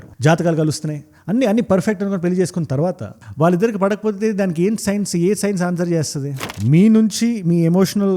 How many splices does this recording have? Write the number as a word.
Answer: one